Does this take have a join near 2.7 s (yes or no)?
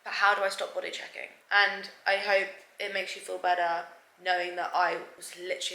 no